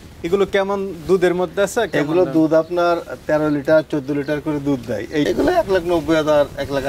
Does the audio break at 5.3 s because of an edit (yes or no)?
yes